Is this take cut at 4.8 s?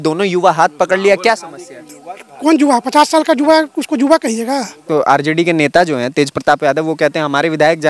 yes; 1 cut; at 4.8 s

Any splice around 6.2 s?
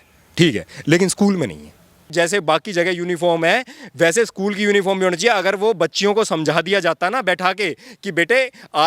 no; 1 cut; at 2.1 s

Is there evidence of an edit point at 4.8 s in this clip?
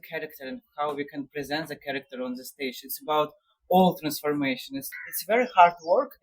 yes; 1 cut; at 4.8 s

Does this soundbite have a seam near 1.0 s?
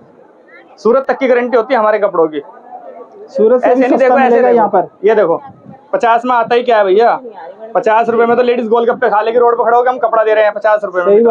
no; 0 cuts

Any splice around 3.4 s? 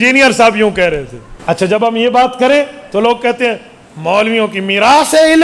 no; 1 cut; at 1.8 s

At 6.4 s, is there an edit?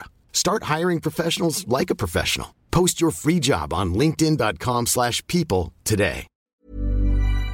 yes; 1 cut; at 6.4 s

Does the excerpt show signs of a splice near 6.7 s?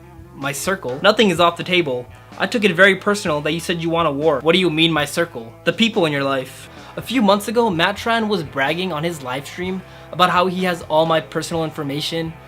yes; 2 cuts; at 4.4 s, 6.7 s

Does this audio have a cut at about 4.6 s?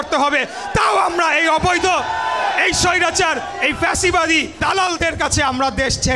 yes; 1 cut; at 4.6 s

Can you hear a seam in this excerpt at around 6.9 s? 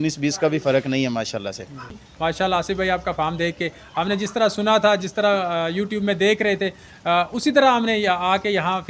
no; 1 cut; at 2.0 s

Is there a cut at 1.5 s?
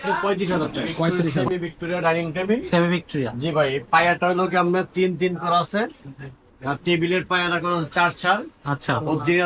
yes; 1 cut; at 1.5 s

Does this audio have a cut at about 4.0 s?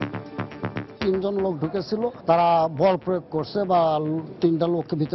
no; 2 cuts; at 1.0 s, 2.1 s

